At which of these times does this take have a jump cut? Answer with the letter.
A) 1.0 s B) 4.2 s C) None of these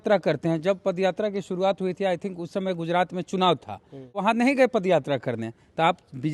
B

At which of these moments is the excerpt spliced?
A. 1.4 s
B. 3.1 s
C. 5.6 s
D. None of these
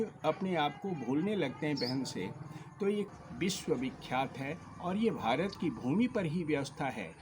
B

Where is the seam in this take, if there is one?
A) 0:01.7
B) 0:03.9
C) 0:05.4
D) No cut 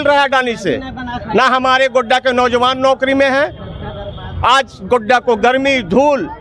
D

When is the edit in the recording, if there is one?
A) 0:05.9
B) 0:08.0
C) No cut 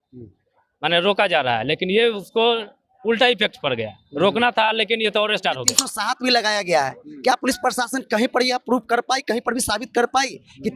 A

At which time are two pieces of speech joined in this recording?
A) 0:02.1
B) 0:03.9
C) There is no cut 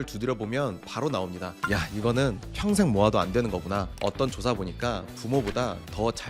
B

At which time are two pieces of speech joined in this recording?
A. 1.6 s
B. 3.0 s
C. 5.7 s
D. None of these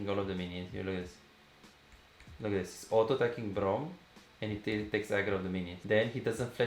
C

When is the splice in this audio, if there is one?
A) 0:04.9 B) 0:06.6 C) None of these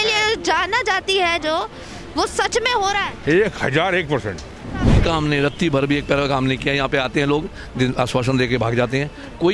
A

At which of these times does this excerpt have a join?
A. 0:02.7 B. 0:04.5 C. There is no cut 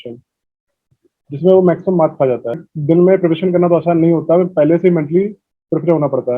A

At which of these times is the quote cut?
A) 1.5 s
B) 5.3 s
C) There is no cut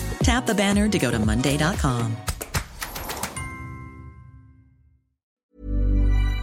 B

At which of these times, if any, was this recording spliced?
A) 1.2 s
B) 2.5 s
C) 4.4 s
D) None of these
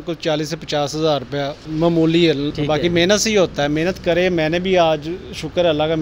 B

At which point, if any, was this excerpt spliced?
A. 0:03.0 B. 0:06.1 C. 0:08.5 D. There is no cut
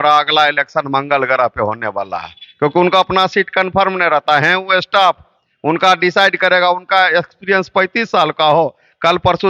D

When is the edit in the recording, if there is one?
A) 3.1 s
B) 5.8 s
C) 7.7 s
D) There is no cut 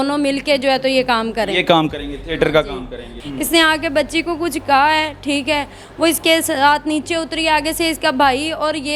A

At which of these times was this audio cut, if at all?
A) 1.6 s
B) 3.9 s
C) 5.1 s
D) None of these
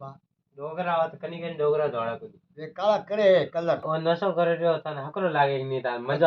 B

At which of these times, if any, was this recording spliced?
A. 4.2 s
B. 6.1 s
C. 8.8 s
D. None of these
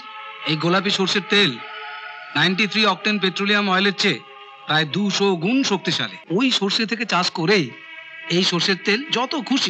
B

